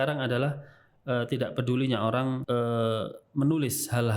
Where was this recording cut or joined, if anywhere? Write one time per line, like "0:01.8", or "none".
0:02.4